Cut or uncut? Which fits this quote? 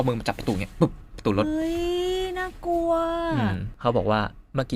uncut